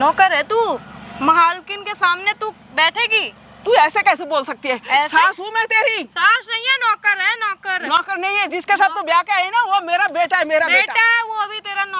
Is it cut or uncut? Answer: uncut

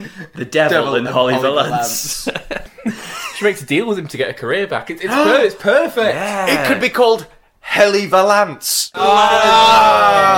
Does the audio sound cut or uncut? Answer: cut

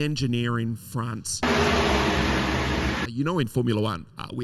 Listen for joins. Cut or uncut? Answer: cut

